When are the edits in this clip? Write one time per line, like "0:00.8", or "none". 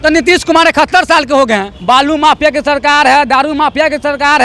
0:01.7